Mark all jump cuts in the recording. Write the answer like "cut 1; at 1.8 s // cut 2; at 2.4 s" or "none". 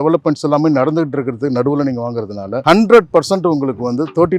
cut 1; at 2.6 s